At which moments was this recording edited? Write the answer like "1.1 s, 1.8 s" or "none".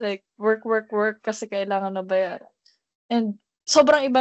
none